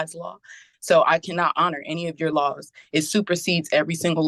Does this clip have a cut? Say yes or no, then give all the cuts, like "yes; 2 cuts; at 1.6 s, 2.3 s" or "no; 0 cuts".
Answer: no; 0 cuts